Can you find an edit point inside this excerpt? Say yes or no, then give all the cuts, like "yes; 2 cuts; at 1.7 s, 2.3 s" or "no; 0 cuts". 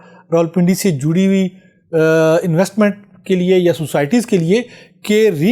no; 0 cuts